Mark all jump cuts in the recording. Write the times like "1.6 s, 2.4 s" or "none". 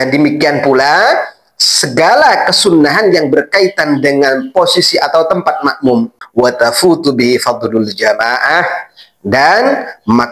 6.2 s